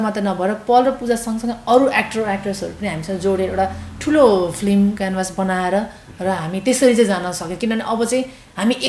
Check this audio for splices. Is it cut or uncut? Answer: uncut